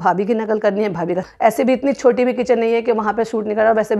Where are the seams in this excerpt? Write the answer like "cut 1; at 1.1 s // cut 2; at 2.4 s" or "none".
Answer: cut 1; at 1.2 s